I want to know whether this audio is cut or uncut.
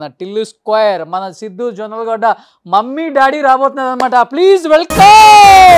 uncut